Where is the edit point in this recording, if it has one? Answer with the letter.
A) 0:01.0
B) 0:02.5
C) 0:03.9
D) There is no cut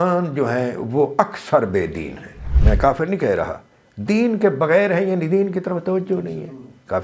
B